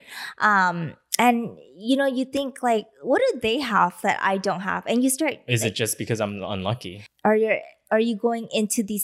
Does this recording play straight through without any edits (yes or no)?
no